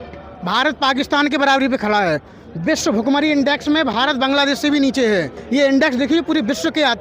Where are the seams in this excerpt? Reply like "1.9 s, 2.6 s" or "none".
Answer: 5.4 s